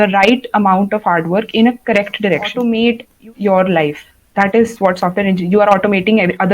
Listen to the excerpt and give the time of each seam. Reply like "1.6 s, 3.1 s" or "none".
2.5 s